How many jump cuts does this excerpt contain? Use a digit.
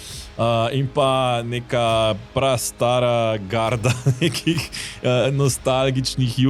0